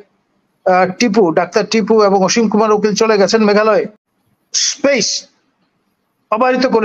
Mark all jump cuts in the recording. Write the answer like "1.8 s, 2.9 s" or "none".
4.0 s